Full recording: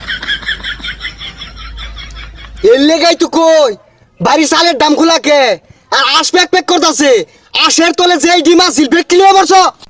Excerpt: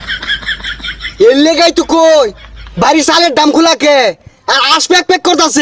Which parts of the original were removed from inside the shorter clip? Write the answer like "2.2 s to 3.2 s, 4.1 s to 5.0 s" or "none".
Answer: 1.1 s to 2.5 s